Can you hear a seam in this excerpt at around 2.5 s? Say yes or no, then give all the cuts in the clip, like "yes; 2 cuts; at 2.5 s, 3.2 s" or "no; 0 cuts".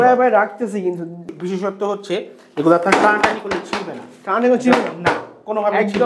no; 1 cut; at 1.2 s